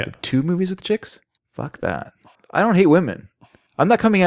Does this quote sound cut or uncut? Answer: cut